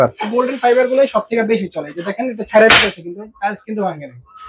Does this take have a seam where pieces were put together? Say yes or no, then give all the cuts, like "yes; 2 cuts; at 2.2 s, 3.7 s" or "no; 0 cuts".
no; 0 cuts